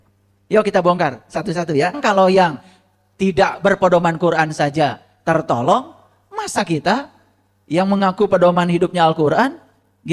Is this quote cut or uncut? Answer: cut